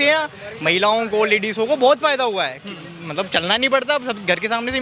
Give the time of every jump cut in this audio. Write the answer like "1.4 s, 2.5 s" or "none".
none